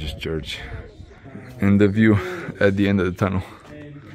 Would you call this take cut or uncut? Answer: cut